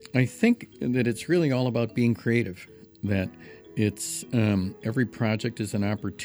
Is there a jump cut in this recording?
no; 0 cuts

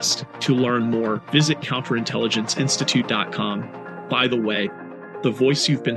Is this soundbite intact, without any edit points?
yes; 0 cuts

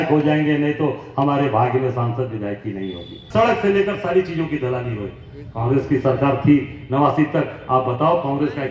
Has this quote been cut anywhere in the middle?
yes; 1 cut; at 3.1 s

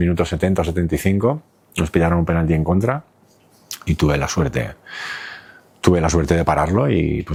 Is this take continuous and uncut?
yes; 0 cuts

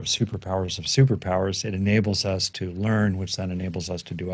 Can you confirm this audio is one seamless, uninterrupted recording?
yes; 0 cuts

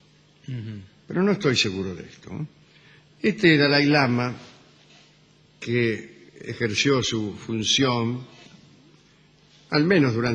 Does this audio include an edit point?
no; 0 cuts

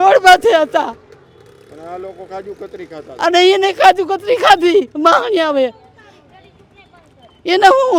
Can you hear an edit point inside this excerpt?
no; 0 cuts

